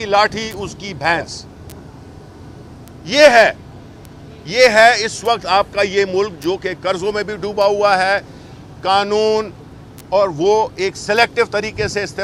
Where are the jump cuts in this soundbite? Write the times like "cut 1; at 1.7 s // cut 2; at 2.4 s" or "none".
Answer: none